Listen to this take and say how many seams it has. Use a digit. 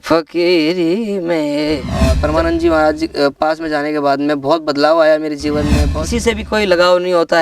2